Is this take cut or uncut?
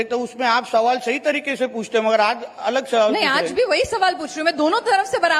uncut